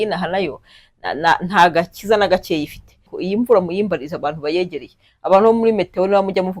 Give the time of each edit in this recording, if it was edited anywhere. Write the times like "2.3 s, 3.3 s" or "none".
3.1 s